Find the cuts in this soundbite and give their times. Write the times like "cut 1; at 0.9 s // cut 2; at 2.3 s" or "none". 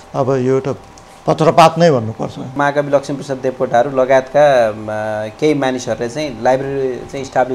cut 1; at 2.5 s